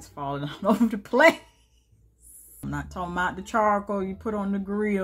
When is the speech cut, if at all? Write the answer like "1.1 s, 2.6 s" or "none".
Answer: 2.6 s

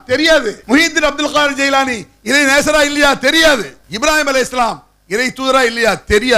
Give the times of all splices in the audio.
3.8 s

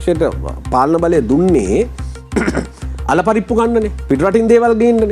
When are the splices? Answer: none

